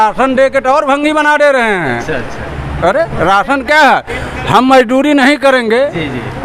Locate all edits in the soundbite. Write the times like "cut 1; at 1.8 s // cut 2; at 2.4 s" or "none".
none